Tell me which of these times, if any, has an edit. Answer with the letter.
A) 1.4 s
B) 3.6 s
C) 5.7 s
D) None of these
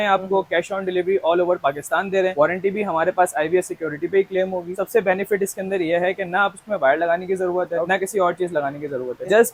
D